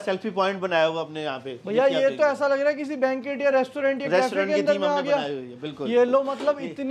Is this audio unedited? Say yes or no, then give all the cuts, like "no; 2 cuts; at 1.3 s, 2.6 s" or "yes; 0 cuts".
yes; 0 cuts